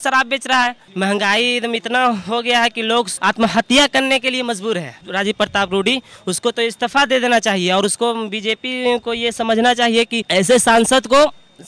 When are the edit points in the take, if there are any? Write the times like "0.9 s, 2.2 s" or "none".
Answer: 0.8 s, 3.1 s, 5.0 s, 10.2 s